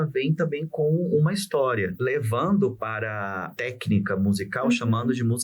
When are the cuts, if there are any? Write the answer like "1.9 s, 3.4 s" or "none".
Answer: 1.9 s, 3.5 s